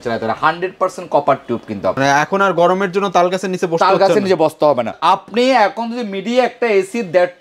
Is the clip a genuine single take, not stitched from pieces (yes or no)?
yes